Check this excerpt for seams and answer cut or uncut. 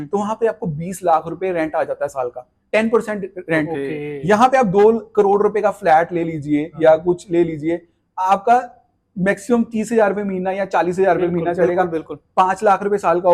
uncut